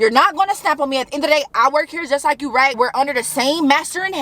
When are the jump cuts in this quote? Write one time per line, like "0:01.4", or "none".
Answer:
0:02.7